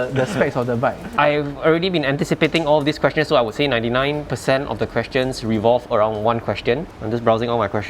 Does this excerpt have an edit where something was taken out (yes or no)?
yes